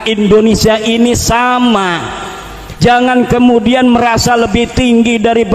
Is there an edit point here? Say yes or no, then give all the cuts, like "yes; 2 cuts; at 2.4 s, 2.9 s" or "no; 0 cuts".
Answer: no; 0 cuts